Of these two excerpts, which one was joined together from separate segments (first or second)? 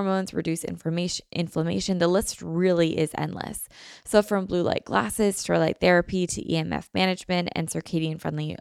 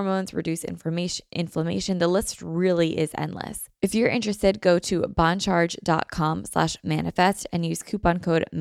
second